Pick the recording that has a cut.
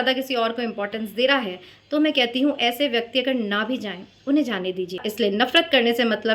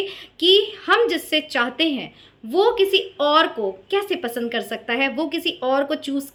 first; 1 cut; at 5.0 s

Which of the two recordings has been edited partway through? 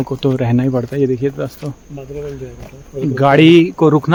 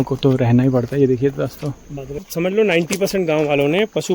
second; 1 cut; at 2.2 s

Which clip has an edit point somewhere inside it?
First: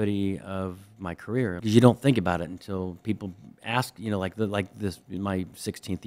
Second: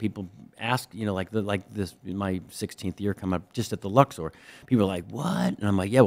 first; 1 cut; at 1.6 s

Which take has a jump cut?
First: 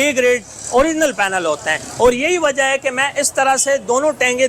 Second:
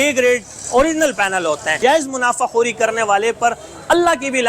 second; 1 cut; at 1.8 s

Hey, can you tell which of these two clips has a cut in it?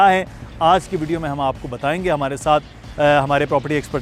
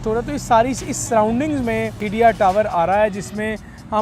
second; 1 cut; at 2.0 s

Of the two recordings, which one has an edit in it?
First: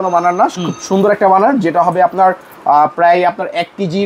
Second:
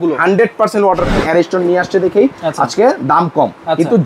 second; 1 cut; at 1.1 s

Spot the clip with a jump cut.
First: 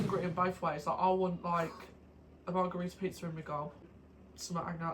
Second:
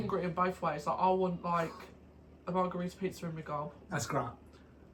first; 1 cut; at 3.9 s

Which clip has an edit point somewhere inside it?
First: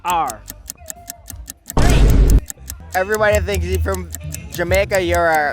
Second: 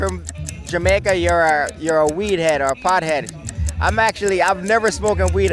first; 2 cuts; at 1.8 s, 2.8 s

